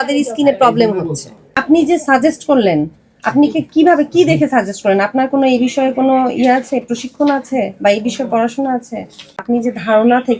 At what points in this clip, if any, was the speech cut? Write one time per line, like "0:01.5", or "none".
0:01.6
0:09.4